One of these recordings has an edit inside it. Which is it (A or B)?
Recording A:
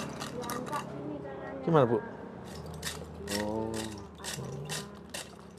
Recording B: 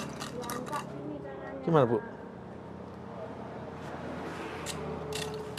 A